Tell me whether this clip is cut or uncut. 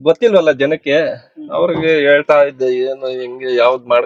uncut